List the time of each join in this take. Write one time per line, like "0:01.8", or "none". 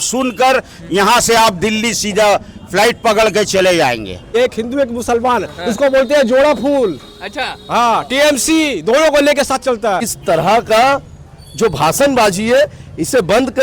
0:04.3
0:10.1